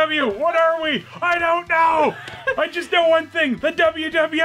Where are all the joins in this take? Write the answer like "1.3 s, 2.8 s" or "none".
none